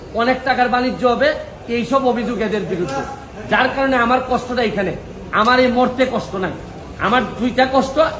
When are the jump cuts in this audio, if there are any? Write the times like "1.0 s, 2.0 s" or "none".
none